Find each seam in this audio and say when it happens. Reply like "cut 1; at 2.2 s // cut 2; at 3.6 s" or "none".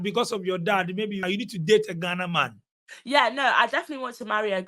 cut 1; at 1.2 s

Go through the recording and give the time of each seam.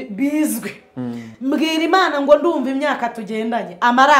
cut 1; at 1.3 s

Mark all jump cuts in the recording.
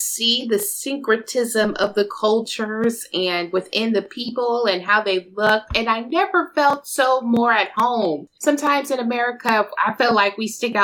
cut 1; at 8.3 s

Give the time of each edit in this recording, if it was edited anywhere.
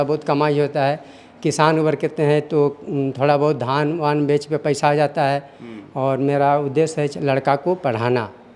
none

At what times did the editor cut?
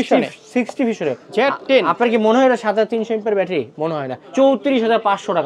cut 1; at 1.2 s // cut 2; at 4.2 s

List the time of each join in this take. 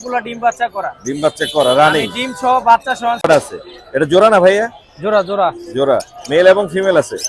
cut 1; at 3.3 s

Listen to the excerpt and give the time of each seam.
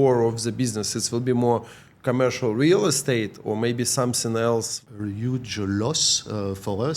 cut 1; at 4.8 s

